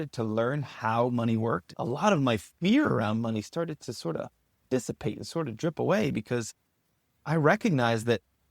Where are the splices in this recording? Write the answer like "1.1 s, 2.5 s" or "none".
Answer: 1.7 s